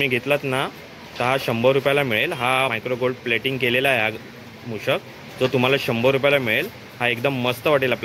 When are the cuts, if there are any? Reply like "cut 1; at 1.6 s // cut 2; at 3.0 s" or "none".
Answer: none